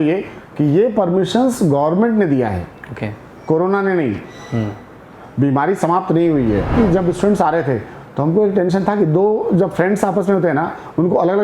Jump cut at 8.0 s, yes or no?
no